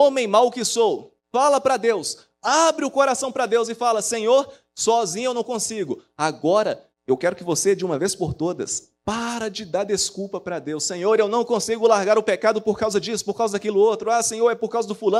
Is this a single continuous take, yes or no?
no